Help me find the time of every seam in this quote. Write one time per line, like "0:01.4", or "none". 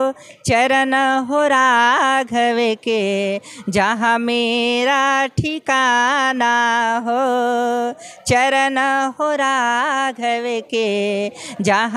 none